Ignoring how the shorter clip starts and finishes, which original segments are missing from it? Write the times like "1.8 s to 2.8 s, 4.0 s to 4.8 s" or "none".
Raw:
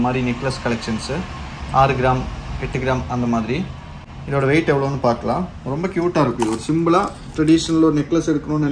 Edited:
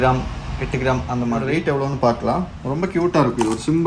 3.5 s to 4.5 s